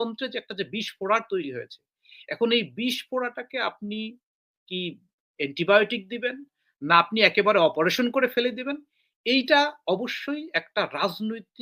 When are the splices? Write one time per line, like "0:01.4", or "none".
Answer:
none